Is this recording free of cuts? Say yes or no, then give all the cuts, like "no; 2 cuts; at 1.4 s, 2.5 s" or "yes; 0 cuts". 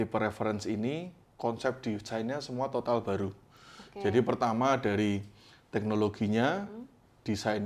yes; 0 cuts